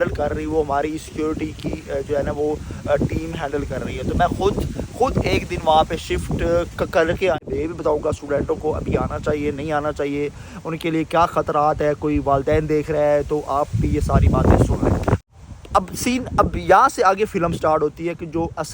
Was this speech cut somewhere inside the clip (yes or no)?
yes